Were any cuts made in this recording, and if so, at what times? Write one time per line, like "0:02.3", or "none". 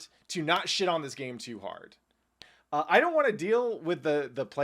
0:02.3

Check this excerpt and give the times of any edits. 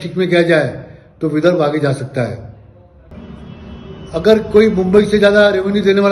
0:03.1

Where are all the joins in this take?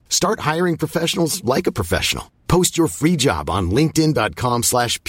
none

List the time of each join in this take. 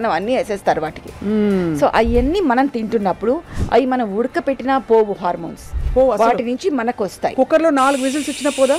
none

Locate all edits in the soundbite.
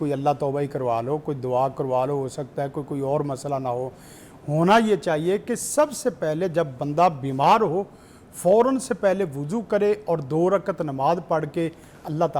none

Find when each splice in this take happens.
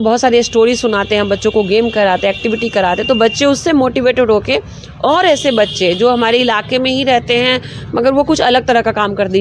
none

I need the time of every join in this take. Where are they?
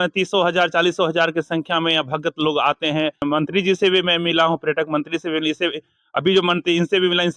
0:03.2

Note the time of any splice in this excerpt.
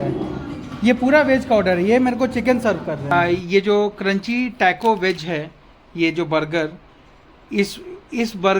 0:03.1

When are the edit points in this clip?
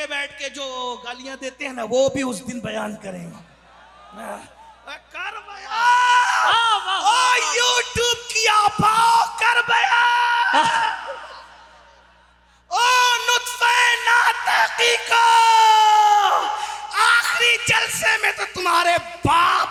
none

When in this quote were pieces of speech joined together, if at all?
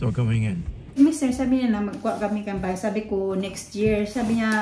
0:00.9

